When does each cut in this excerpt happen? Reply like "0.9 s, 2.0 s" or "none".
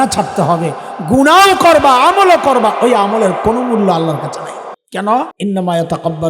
4.8 s, 5.3 s